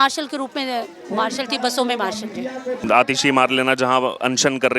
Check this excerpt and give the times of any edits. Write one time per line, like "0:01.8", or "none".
0:02.8